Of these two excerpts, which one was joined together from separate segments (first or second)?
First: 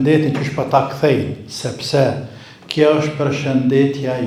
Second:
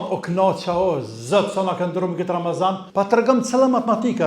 second